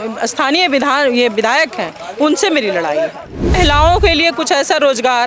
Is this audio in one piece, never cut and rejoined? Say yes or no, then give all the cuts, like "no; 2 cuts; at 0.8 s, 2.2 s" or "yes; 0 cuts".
no; 1 cut; at 3.5 s